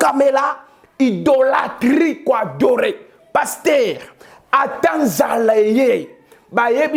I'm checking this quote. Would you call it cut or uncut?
uncut